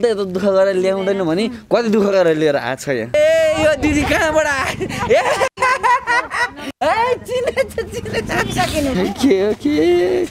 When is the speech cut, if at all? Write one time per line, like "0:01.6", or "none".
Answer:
0:03.1
0:08.9